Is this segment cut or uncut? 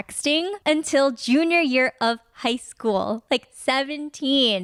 uncut